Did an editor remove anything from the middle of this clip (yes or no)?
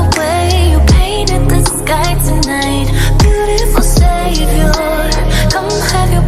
no